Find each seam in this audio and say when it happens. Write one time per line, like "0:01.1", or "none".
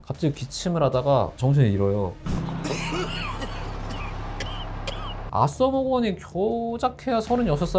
0:05.1